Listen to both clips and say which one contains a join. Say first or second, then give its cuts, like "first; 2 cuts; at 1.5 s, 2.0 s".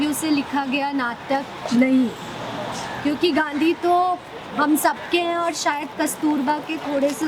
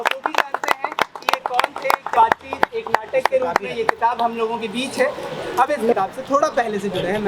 second; 2 cuts; at 2.1 s, 5.9 s